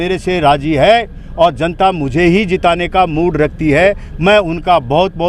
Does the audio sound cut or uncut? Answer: uncut